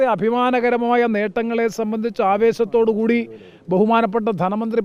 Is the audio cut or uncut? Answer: uncut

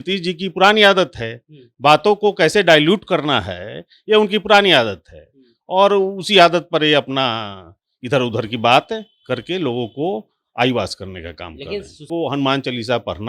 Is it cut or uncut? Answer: cut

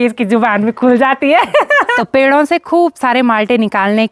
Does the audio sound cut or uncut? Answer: cut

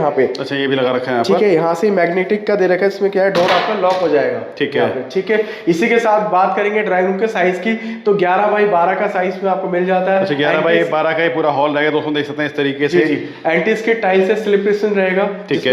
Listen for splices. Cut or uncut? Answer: uncut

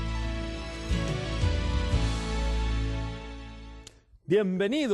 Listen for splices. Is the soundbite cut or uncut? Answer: cut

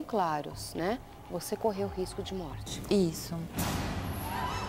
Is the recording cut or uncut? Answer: cut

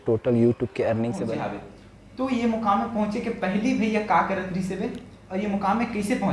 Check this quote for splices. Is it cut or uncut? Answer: cut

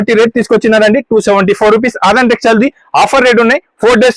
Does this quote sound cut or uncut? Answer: uncut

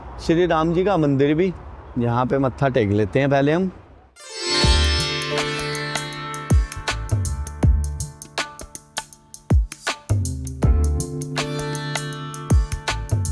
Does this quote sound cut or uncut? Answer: uncut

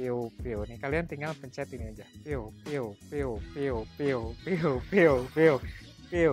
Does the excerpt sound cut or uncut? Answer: uncut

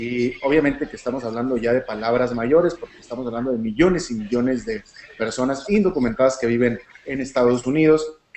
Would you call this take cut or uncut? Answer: cut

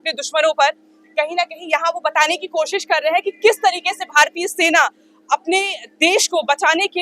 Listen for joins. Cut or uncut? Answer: uncut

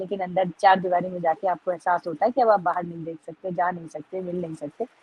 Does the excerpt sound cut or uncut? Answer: uncut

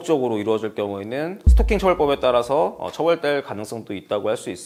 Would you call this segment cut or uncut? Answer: uncut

